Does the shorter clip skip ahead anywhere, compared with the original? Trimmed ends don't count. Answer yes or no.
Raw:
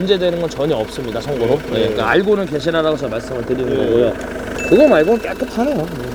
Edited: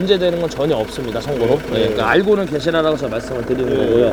no